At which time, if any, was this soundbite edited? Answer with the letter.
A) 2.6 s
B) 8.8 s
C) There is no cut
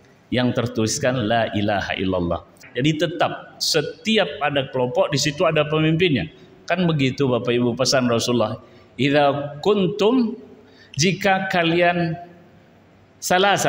A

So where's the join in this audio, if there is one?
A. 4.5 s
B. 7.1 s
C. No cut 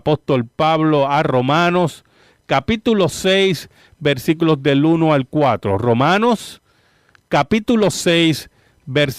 A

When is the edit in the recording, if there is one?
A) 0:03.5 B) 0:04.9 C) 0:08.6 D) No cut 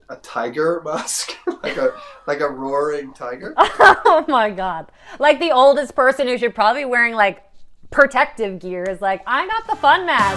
A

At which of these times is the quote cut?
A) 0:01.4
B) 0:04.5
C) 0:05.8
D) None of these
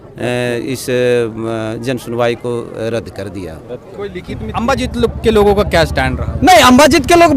B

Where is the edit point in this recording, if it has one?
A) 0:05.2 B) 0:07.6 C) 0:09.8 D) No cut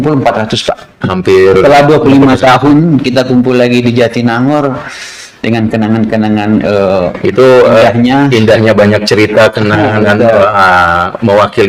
D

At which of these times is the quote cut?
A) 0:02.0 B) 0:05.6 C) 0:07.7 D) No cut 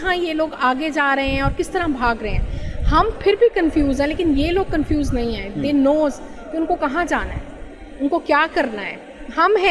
D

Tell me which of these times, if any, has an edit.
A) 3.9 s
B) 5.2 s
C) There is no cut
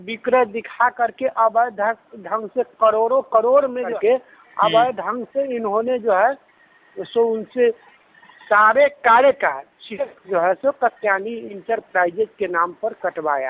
A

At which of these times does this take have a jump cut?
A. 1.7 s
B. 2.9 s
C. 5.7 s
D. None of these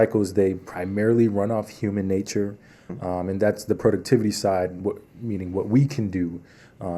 B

